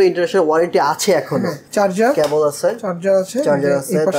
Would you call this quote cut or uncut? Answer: cut